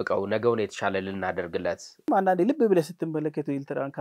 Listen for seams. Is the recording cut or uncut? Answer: cut